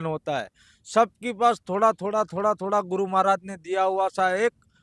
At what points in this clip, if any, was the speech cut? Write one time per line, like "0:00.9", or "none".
none